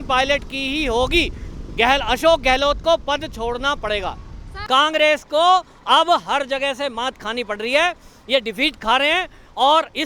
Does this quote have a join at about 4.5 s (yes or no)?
yes